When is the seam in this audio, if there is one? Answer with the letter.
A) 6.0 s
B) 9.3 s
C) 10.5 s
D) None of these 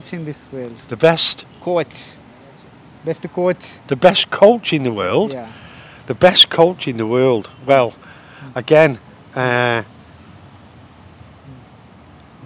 D